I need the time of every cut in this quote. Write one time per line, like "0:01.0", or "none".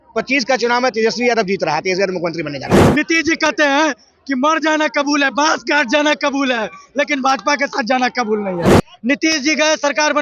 0:02.8
0:08.7